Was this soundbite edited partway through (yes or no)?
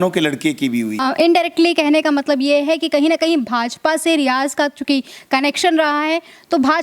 yes